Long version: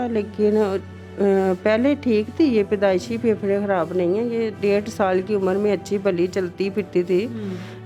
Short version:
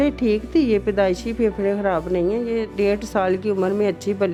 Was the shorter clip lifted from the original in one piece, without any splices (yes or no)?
yes